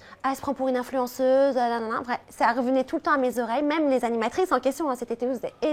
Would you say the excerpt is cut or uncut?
uncut